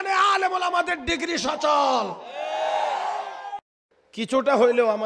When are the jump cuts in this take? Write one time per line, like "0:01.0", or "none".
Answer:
0:03.4